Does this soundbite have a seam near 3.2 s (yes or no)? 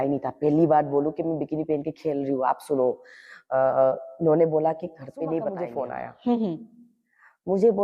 no